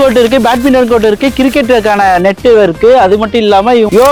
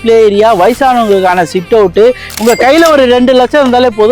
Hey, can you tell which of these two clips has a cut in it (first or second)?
second